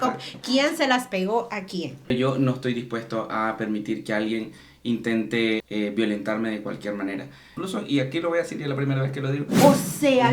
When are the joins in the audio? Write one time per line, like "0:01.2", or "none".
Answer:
0:02.1
0:05.6
0:07.6
0:09.5